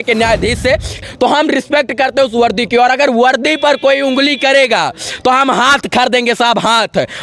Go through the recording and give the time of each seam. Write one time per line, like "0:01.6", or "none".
0:01.0